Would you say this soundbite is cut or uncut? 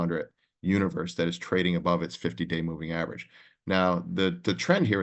uncut